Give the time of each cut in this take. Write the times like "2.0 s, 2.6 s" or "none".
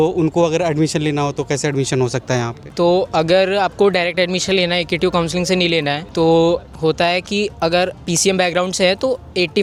none